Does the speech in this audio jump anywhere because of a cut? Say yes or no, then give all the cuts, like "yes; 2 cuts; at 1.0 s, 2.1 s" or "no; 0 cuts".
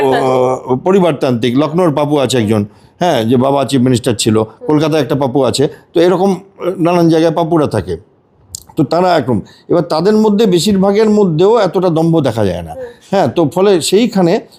no; 0 cuts